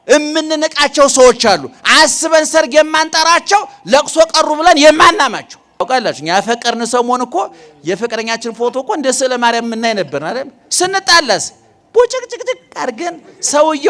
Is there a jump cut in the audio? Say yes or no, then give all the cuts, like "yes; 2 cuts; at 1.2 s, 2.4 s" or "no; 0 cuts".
yes; 1 cut; at 5.8 s